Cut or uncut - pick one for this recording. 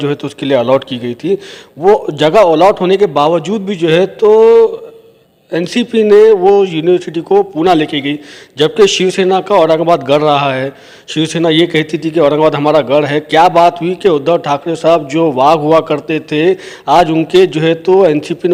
uncut